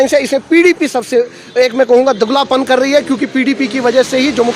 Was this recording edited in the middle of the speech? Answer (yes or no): no